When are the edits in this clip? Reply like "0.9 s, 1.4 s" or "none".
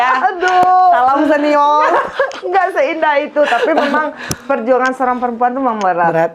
none